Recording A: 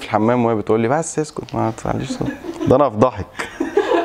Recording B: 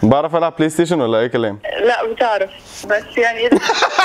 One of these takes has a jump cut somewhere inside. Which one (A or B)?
A